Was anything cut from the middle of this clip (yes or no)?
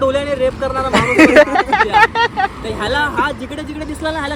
no